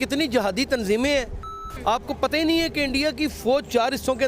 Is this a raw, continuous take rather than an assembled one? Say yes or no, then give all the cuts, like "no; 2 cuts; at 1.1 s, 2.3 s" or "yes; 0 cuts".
no; 1 cut; at 1.3 s